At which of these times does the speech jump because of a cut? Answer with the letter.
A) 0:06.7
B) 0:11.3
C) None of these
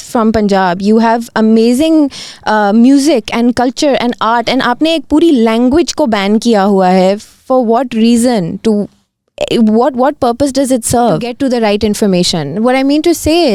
B